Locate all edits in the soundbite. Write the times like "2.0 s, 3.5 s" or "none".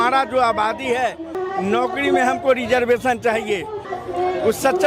1.3 s, 3.9 s